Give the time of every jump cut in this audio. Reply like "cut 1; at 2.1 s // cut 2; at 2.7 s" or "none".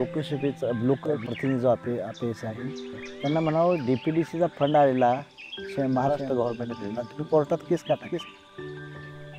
none